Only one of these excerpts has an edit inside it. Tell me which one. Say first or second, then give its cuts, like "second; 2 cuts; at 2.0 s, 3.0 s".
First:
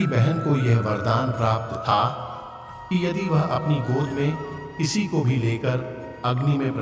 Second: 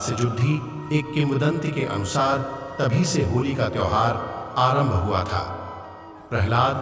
first; 1 cut; at 1.8 s